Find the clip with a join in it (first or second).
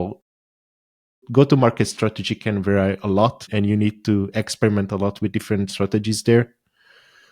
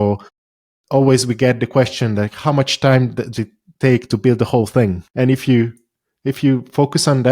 first